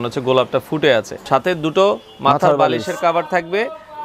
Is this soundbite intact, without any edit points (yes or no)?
no